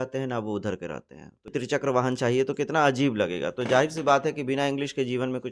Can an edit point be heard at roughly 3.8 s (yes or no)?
no